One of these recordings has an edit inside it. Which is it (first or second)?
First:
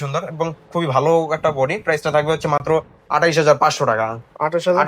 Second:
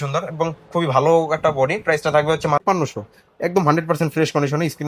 second